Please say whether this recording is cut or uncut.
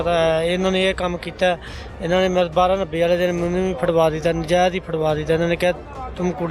uncut